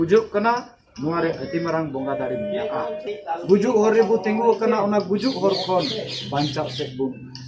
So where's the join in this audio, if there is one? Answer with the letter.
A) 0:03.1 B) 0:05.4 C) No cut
A